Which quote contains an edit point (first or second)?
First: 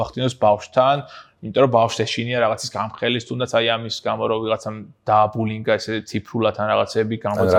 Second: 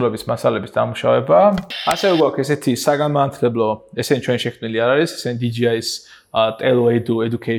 second